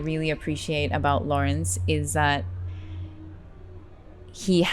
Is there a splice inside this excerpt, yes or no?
no